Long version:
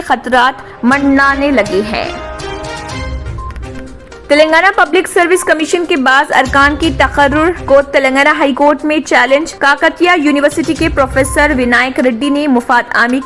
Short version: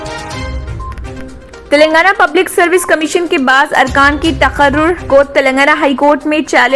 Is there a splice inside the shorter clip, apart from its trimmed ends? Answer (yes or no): no